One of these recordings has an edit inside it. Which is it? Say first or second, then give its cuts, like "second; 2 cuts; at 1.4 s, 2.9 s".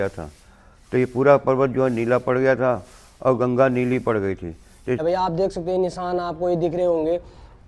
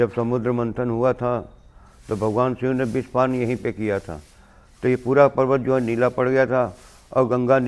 first; 1 cut; at 5.0 s